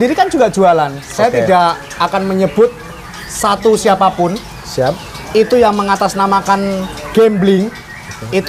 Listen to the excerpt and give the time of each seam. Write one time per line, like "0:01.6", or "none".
none